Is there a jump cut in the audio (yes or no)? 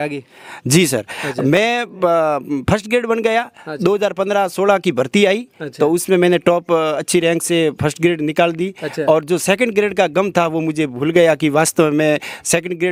no